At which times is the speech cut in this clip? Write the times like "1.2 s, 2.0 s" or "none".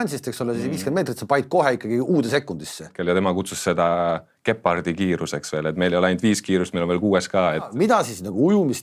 2.9 s, 7.7 s